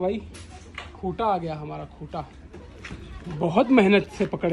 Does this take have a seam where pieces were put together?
no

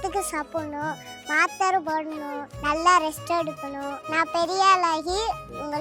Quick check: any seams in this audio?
yes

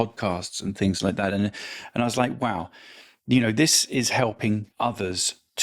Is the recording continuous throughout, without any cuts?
no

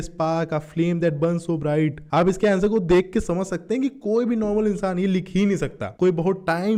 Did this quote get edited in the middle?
no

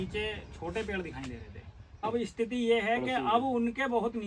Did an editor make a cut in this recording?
yes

